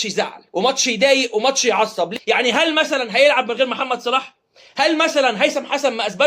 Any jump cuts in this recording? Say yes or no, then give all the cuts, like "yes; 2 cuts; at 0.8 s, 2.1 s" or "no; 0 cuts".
yes; 1 cut; at 2.1 s